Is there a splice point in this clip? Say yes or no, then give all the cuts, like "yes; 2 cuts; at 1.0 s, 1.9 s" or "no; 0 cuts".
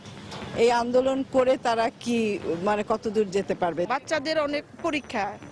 yes; 1 cut; at 3.9 s